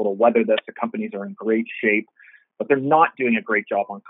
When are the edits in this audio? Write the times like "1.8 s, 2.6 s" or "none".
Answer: none

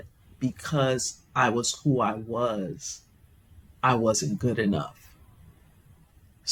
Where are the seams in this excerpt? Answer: none

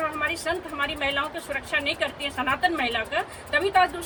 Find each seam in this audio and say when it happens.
none

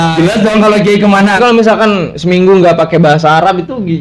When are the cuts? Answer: 1.4 s

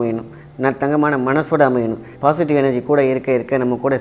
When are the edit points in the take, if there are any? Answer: 2.0 s

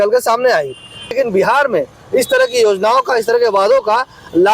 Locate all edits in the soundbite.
1.2 s

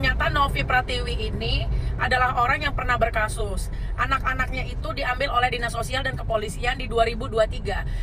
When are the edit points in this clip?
none

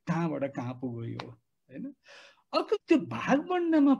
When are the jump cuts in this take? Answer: 2.8 s

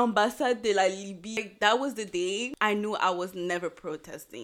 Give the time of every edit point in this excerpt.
1.4 s

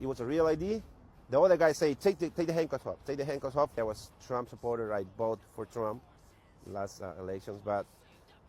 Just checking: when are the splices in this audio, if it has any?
none

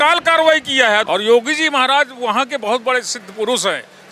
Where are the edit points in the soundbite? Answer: 1.1 s

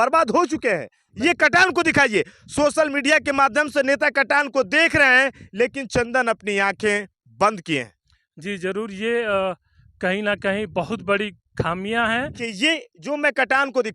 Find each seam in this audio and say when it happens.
1.1 s, 12.4 s

